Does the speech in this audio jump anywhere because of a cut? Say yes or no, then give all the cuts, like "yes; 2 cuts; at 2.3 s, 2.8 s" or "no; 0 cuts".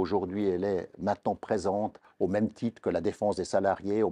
yes; 1 cut; at 2.0 s